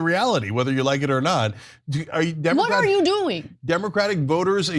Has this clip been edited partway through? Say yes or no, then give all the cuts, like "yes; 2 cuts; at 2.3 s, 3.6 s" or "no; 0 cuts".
no; 0 cuts